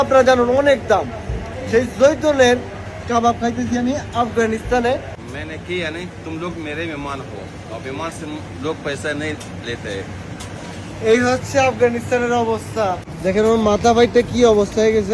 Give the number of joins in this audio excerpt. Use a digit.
2